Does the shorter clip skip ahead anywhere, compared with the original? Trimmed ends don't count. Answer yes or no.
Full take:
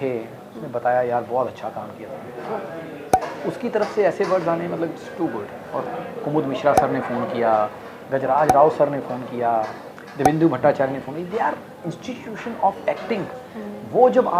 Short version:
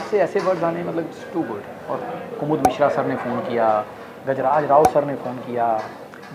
no